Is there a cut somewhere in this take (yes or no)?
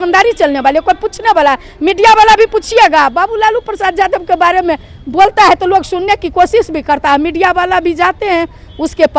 no